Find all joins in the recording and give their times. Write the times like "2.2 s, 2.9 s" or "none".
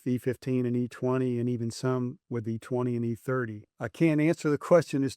3.8 s